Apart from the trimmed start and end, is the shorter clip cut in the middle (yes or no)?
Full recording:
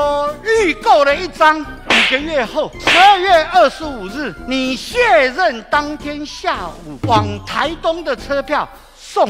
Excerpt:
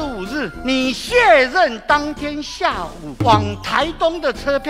no